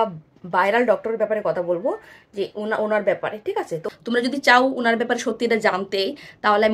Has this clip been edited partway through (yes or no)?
yes